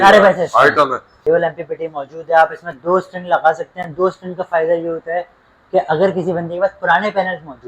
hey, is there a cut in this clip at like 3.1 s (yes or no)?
no